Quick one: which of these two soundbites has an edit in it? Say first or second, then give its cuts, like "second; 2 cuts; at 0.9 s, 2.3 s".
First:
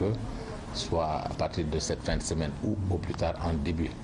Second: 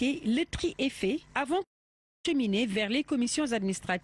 second; 1 cut; at 1.1 s